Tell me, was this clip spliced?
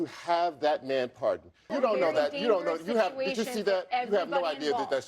yes; 1 cut; at 1.7 s

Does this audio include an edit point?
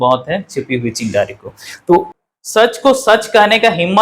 yes; 1 cut; at 2.2 s

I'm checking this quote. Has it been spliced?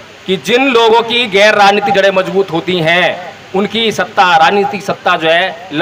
no; 0 cuts

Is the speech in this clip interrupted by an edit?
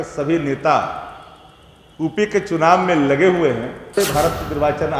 yes; 1 cut; at 3.9 s

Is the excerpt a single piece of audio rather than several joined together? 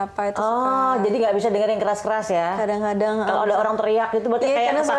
yes; 0 cuts

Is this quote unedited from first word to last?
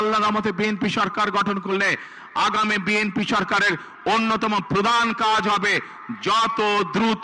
yes; 0 cuts

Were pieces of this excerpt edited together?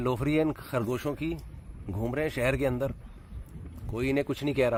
no; 0 cuts

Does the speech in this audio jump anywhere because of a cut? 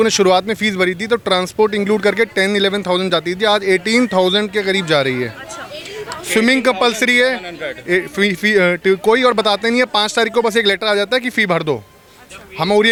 no; 0 cuts

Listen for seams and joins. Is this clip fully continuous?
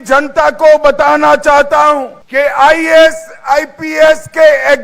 no; 1 cut; at 2.2 s

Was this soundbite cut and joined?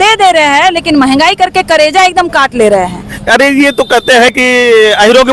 yes; 1 cut; at 3.1 s

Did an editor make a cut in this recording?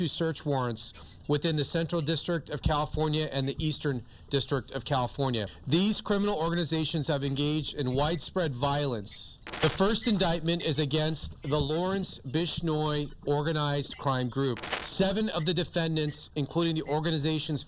yes; 3 cuts; at 5.6 s, 9.6 s, 14.8 s

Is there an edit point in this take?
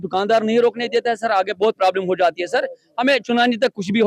no; 0 cuts

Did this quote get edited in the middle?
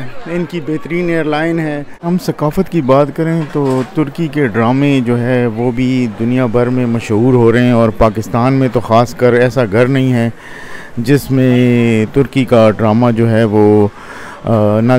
no; 0 cuts

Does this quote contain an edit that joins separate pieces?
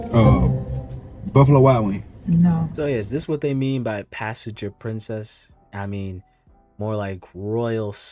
yes; 1 cut; at 2.7 s

